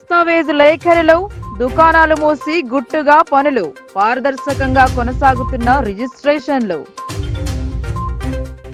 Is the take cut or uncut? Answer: uncut